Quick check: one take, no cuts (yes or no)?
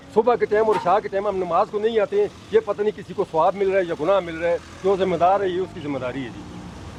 yes